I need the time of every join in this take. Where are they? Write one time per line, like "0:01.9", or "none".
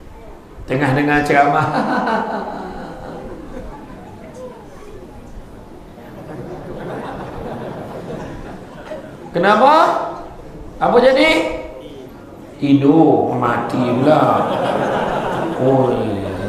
none